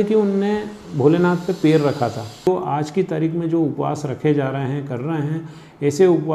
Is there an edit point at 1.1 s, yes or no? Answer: no